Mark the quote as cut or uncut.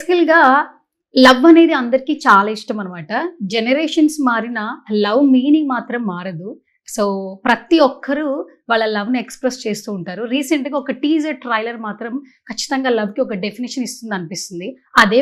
uncut